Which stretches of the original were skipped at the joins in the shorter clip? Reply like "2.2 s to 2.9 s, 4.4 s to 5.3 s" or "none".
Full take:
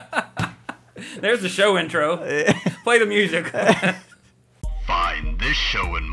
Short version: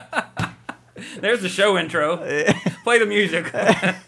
none